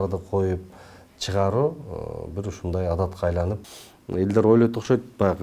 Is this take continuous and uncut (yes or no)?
no